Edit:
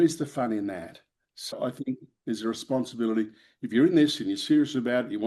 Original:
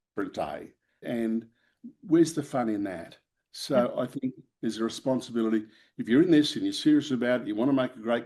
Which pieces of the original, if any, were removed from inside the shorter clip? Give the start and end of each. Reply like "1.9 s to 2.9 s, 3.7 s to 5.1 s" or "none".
3.7 s to 3.9 s